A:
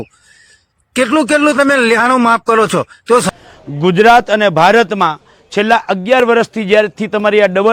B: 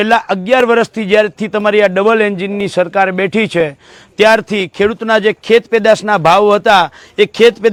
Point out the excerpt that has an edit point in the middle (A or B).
A